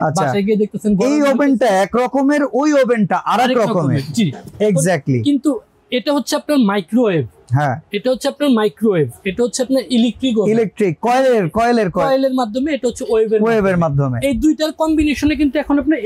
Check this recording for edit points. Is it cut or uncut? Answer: uncut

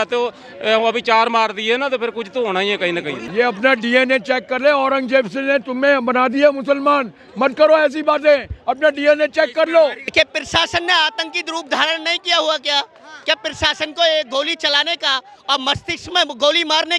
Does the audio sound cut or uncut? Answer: cut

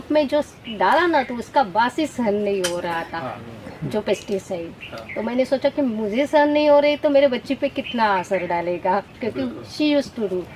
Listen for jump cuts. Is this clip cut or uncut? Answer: uncut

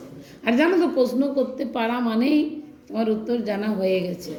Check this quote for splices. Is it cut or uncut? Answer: uncut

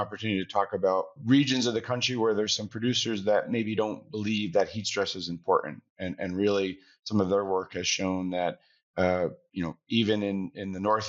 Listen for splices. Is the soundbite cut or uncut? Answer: cut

